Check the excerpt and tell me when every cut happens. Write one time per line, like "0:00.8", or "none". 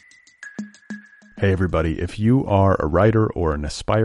0:00.9